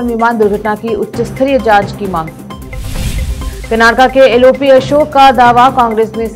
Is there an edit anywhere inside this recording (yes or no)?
no